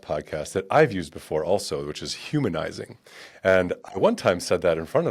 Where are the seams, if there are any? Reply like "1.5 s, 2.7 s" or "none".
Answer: none